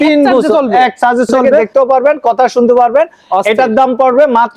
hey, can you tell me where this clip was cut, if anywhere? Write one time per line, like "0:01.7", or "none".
0:01.7